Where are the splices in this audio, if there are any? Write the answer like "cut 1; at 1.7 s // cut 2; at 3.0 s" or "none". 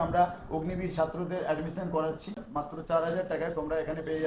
cut 1; at 2.4 s